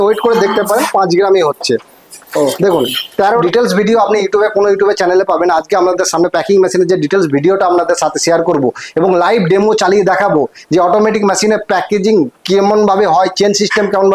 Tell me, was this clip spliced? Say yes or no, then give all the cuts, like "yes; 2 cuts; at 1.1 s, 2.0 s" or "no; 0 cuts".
yes; 1 cut; at 3.3 s